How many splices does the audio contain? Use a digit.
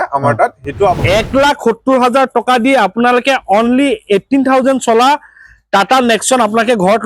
1